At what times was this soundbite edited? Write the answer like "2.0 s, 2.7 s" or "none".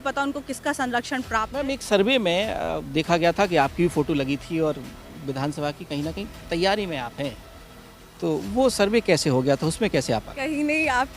1.6 s